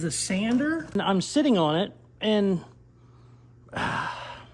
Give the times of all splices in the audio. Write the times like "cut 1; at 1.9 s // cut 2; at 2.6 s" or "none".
cut 1; at 1.0 s